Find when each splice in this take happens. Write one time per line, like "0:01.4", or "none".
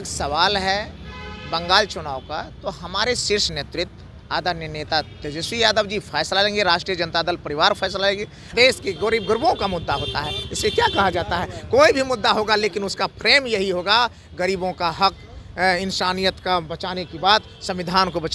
0:08.4